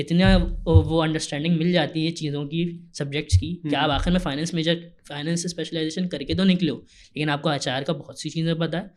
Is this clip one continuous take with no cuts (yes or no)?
yes